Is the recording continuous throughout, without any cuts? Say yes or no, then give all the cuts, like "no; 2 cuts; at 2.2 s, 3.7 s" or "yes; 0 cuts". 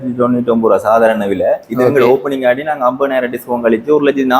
yes; 0 cuts